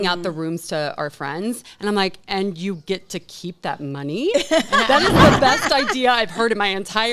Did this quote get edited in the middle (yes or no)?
no